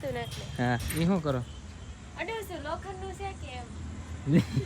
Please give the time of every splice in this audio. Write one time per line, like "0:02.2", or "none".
0:00.9

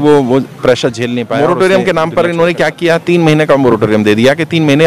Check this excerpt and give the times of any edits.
0:01.3

